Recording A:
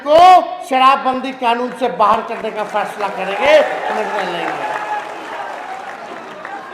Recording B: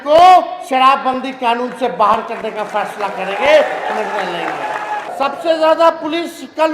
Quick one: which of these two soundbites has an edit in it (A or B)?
B